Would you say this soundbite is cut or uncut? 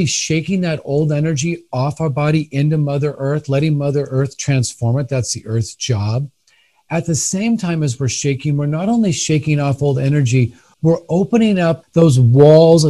cut